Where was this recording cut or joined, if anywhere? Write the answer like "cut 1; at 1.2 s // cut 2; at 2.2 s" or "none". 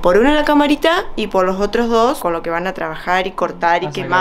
cut 1; at 2.2 s